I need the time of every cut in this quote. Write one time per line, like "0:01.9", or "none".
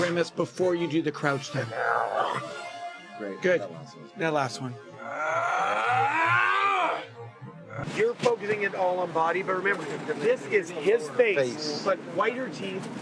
0:07.8

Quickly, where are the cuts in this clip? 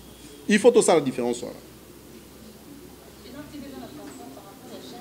none

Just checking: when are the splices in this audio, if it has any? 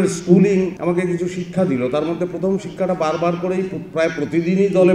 none

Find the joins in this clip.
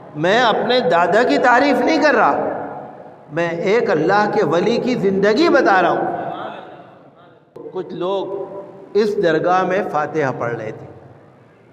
0:07.6

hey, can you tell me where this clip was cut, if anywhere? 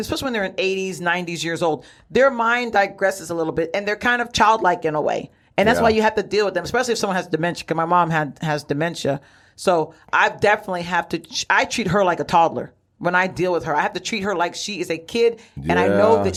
none

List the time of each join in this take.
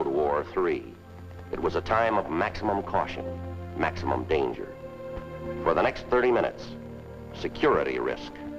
0:03.2

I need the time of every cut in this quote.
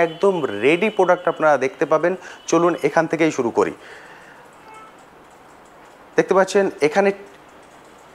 none

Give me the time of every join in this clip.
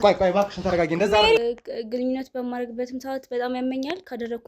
0:01.4

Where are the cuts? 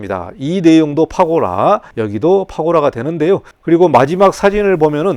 0:01.9
0:03.5

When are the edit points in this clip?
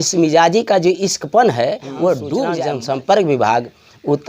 0:02.6

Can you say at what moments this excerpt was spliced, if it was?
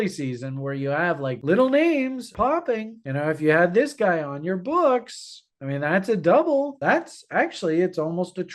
0:01.4
0:02.3

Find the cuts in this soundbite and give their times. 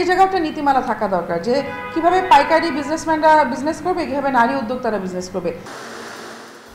none

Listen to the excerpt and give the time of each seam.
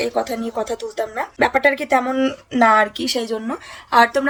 none

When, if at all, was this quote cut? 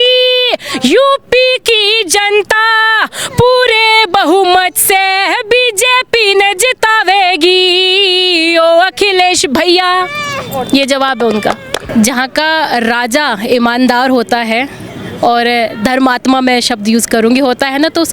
0:11.8

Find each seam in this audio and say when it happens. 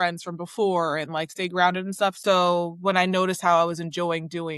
0:02.2

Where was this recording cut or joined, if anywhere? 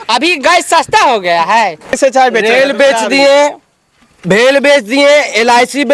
0:01.9

